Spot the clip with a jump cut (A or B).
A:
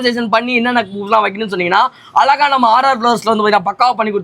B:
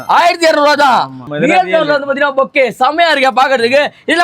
B